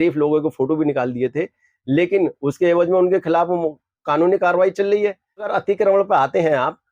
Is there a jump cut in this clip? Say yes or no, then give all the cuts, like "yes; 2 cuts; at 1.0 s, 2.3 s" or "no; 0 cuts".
yes; 1 cut; at 5.5 s